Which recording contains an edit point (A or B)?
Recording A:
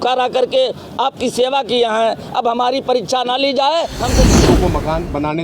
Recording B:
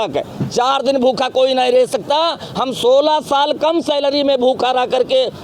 A